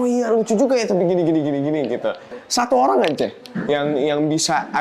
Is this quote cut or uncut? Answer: cut